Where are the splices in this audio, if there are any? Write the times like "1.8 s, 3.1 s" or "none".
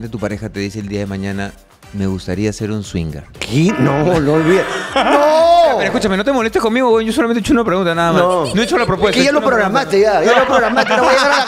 3.4 s